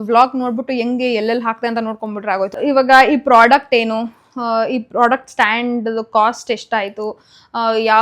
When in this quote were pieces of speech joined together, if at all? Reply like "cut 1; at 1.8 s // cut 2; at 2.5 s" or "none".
cut 1; at 2.5 s